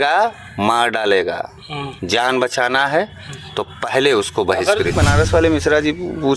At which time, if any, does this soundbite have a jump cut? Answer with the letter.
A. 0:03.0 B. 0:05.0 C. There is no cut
B